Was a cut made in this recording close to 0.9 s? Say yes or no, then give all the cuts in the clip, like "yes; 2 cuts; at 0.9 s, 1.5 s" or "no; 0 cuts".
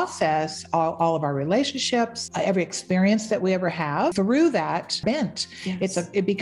no; 3 cuts; at 2.2 s, 4.1 s, 5.0 s